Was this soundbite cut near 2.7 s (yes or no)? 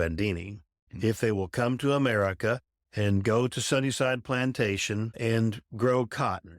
yes